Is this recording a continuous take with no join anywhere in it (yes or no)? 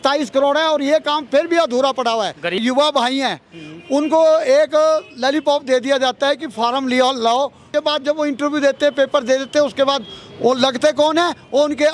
no